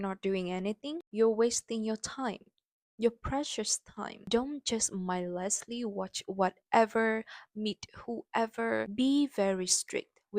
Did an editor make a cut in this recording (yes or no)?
yes